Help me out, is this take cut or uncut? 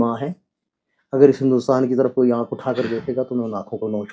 uncut